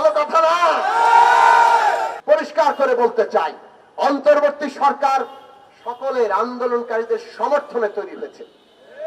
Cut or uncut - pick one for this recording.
cut